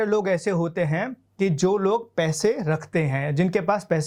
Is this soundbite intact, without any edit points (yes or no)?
yes